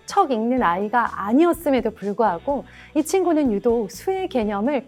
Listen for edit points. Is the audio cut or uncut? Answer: uncut